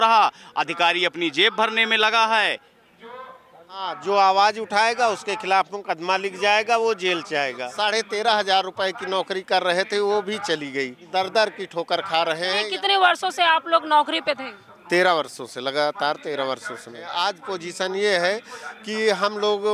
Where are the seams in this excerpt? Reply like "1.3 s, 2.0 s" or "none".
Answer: 4.0 s, 7.7 s, 11.0 s, 12.6 s, 17.0 s